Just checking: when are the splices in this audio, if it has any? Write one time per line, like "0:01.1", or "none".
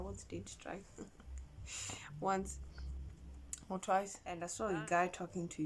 0:04.5